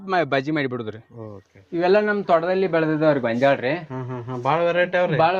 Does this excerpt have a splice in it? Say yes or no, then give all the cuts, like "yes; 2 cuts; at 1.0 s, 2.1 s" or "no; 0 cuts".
yes; 1 cut; at 1.8 s